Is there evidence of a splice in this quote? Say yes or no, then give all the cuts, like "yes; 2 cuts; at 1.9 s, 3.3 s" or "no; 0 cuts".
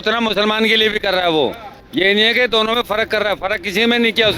no; 0 cuts